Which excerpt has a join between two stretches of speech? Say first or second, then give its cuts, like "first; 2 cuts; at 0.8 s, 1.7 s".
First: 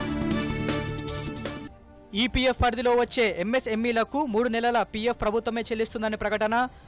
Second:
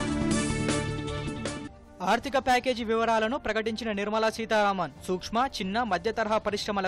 first; 1 cut; at 1.8 s